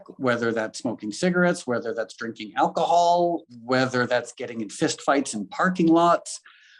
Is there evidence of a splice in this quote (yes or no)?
yes